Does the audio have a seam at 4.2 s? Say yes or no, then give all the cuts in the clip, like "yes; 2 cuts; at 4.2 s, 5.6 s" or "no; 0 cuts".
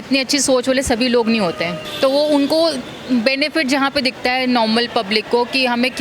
no; 1 cut; at 1.8 s